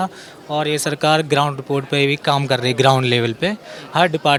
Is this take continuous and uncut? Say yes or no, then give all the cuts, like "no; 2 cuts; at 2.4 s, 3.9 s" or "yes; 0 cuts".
yes; 0 cuts